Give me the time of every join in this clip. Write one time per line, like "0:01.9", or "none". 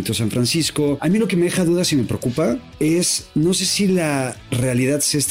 0:01.0
0:02.7
0:04.4